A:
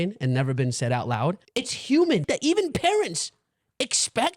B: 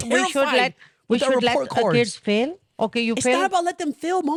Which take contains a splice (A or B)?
A